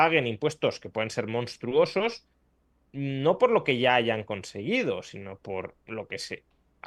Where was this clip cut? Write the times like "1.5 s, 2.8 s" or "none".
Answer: none